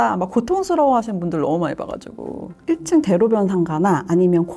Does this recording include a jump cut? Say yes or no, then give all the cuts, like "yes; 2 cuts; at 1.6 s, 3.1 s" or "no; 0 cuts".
yes; 1 cut; at 2.6 s